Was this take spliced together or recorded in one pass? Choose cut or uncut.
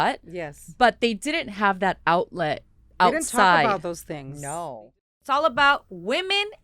cut